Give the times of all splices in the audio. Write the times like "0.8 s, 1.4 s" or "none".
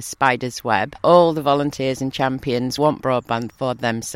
1.0 s, 2.8 s